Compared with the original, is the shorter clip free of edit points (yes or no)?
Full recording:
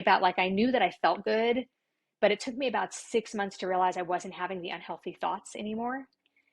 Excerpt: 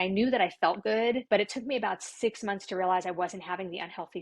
no